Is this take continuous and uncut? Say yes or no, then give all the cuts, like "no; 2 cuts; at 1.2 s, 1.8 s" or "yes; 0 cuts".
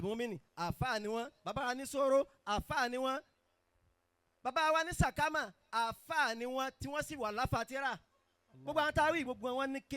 yes; 0 cuts